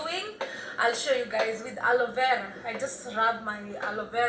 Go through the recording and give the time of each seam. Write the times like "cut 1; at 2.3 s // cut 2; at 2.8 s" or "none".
none